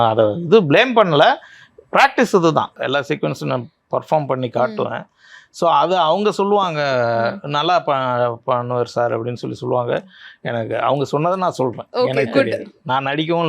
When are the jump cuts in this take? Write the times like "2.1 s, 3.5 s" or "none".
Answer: 2.8 s